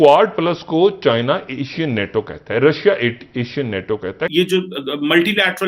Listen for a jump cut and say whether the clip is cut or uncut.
cut